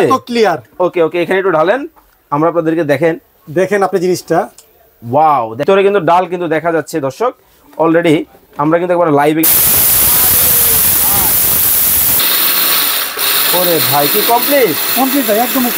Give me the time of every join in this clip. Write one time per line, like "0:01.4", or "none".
0:05.6
0:12.2